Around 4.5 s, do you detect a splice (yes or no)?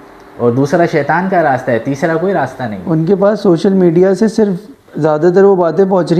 no